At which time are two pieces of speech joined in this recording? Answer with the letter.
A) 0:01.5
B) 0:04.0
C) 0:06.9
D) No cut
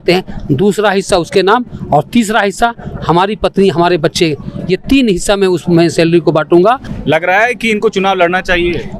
C